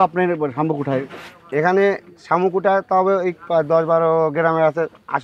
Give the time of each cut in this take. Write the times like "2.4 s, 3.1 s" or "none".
none